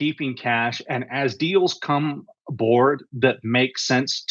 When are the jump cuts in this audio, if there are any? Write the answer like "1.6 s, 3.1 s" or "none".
none